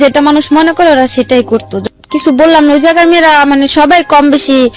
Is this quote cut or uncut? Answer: cut